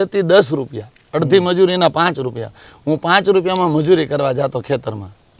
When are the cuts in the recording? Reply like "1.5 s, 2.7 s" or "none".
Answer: none